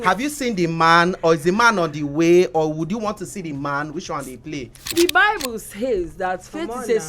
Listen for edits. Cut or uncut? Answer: cut